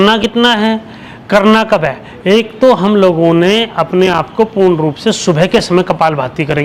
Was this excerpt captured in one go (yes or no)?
yes